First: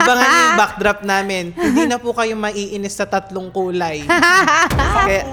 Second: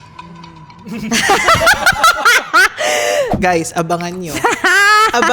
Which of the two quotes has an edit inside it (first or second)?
second